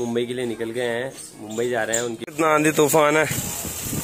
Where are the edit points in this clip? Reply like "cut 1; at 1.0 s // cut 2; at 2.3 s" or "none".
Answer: cut 1; at 2.2 s

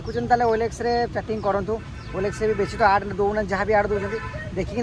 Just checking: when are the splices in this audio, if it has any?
none

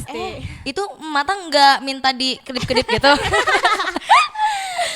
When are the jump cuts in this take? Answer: none

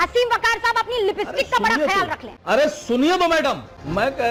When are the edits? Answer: none

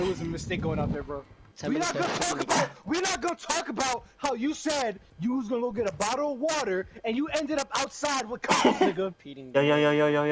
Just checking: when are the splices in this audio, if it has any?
cut 1; at 1.4 s // cut 2; at 5.1 s // cut 3; at 9.2 s

